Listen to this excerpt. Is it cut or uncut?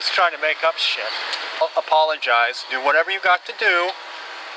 cut